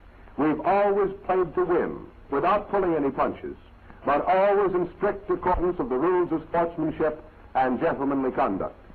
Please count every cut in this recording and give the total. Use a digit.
1